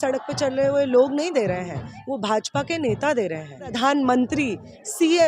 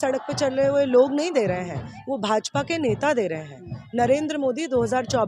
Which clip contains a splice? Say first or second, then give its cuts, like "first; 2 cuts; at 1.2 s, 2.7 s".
first; 1 cut; at 3.7 s